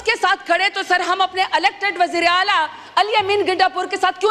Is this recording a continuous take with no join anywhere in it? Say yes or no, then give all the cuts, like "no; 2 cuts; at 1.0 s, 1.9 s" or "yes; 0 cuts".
yes; 0 cuts